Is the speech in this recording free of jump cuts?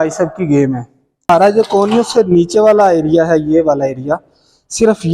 no; 1 cut; at 1.3 s

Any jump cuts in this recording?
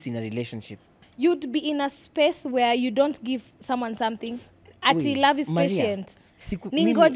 yes; 1 cut; at 1.0 s

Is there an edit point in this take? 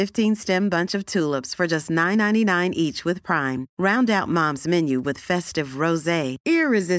no; 0 cuts

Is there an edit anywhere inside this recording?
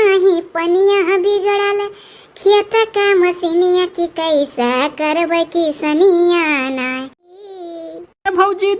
yes; 1 cut; at 7.4 s

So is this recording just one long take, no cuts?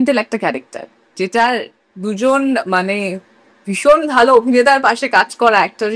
no; 1 cut; at 1.8 s

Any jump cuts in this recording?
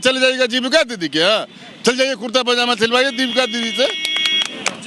no; 0 cuts

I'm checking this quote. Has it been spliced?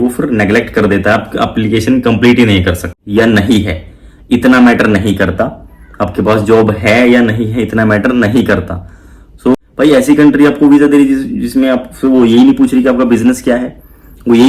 yes; 2 cuts; at 2.9 s, 9.5 s

